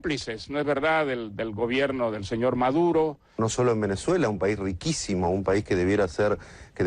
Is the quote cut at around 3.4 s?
yes; 1 cut; at 3.4 s

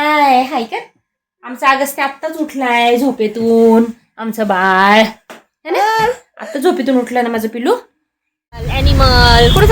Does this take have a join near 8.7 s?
yes; 1 cut; at 8.7 s

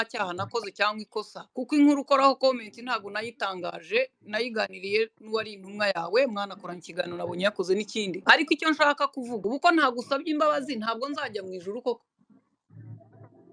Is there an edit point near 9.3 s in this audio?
yes; 3 cuts; at 1.4 s, 8.2 s, 9.3 s

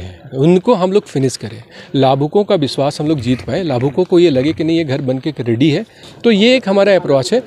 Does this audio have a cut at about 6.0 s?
yes; 1 cut; at 6.0 s

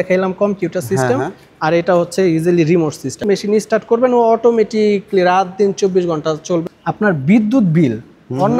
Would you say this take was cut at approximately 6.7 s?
yes; 2 cuts; at 3.2 s, 6.7 s

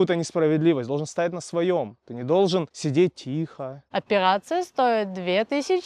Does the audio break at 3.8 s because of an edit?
yes; 1 cut; at 3.8 s

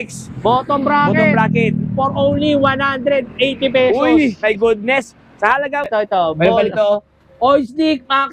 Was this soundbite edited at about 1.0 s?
no; 1 cut; at 5.8 s

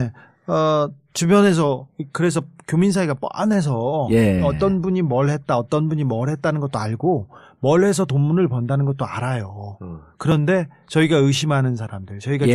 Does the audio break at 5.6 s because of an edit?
yes; 1 cut; at 5.6 s

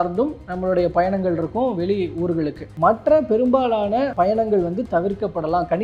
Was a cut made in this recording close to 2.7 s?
yes; 1 cut; at 2.7 s

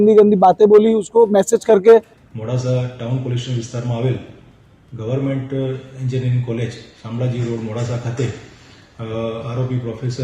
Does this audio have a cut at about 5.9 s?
no; 1 cut; at 2.2 s

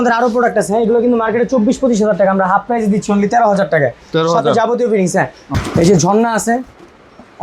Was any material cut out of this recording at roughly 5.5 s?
yes; 1 cut; at 5.5 s

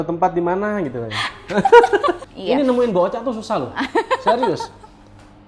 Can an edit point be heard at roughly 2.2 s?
yes; 1 cut; at 2.2 s

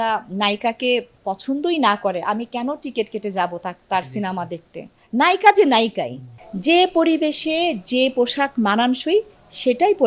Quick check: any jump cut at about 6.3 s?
yes; 2 cuts; at 4.9 s, 6.3 s

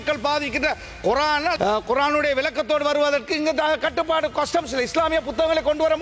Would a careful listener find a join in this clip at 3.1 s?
no; 1 cut; at 1.5 s

